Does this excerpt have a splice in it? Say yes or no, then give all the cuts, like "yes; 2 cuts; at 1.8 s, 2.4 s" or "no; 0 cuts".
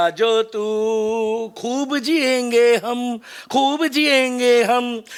no; 0 cuts